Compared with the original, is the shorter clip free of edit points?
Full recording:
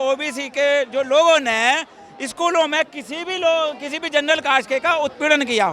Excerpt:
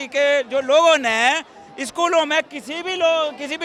yes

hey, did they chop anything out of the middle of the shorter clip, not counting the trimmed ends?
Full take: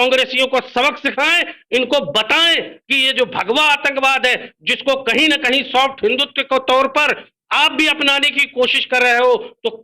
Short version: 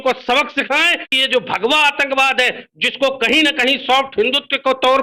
yes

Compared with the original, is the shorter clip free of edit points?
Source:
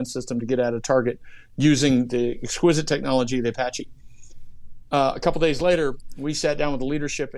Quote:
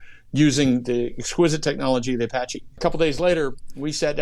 no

